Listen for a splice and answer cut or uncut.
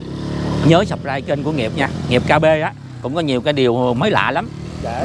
uncut